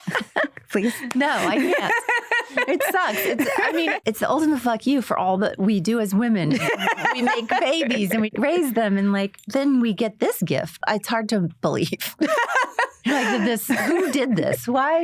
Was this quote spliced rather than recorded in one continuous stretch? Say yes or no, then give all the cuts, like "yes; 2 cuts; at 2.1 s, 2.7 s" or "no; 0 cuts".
no; 0 cuts